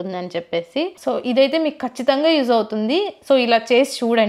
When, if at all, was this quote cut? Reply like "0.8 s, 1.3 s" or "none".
1.0 s